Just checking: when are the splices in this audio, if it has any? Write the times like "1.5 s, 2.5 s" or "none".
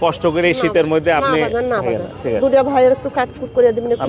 none